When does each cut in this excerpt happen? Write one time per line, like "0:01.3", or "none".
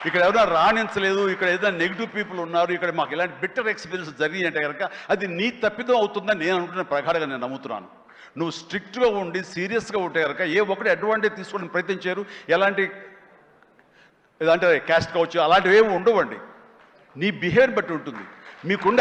none